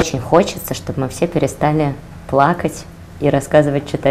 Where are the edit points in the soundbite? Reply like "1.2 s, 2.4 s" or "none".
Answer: none